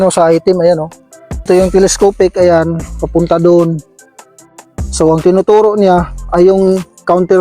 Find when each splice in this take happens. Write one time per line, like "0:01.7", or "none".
0:01.5